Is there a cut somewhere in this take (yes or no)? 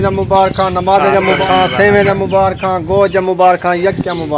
yes